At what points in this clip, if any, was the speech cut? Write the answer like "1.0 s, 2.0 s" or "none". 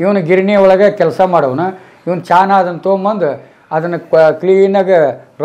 none